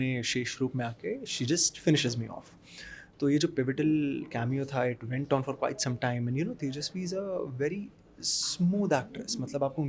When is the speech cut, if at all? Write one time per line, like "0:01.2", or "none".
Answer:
none